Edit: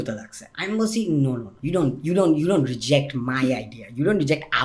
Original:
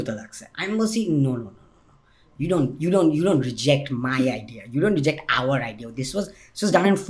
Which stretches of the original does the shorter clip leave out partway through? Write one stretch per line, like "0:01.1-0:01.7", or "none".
0:01.5-0:02.3